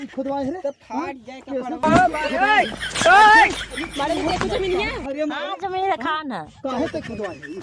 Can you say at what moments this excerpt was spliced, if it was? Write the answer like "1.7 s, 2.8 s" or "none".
none